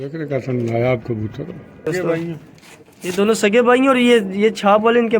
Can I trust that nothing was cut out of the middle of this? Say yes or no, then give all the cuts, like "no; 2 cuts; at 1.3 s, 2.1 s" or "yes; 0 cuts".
no; 1 cut; at 1.9 s